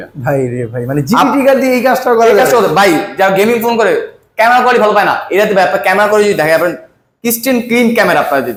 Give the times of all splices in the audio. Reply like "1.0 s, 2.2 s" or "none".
none